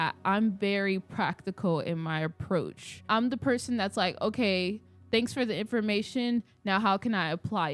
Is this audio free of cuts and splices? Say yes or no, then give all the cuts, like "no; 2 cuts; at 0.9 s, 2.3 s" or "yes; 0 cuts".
yes; 0 cuts